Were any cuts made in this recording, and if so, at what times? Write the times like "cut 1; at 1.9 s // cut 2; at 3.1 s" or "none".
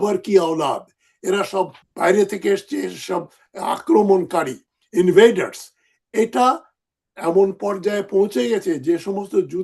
cut 1; at 1.8 s